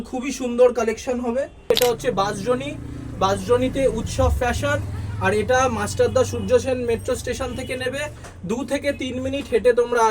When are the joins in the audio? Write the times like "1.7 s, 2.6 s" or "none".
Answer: 1.6 s

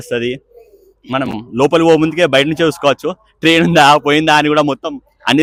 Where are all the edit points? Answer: none

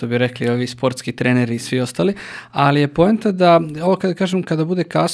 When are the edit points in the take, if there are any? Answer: none

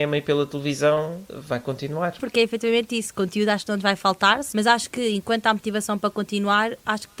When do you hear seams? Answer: 1.3 s, 2.2 s, 4.4 s

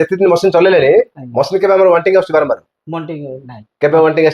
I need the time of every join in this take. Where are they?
none

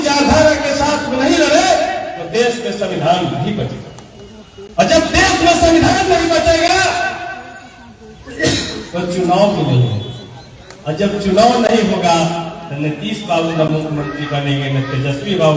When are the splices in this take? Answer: none

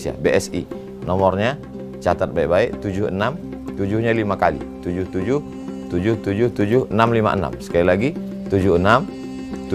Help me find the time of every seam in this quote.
none

